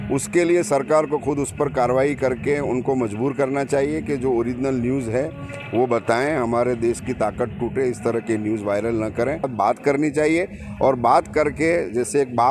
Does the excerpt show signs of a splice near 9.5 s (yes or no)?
yes